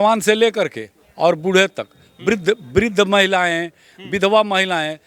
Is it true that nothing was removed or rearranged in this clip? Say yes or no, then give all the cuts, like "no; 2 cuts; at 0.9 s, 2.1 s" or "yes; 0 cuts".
yes; 0 cuts